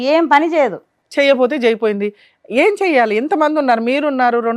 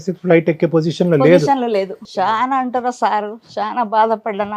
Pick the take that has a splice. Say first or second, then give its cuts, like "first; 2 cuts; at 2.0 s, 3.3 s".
second; 1 cut; at 2.0 s